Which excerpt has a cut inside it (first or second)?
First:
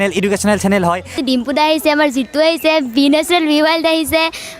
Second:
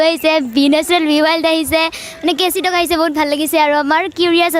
first